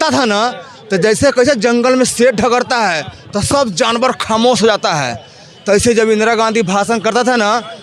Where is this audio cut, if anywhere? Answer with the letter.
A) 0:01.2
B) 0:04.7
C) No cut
C